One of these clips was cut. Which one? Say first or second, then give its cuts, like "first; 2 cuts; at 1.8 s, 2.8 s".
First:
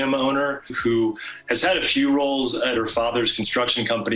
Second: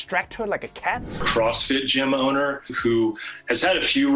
second; 1 cut; at 1.1 s